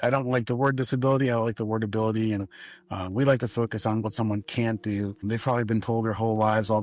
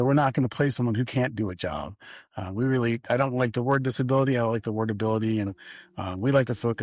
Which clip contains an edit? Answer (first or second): first